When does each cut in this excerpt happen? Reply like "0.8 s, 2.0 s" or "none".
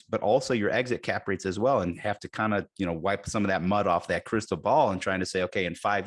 none